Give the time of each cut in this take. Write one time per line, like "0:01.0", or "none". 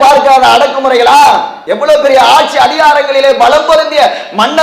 0:01.6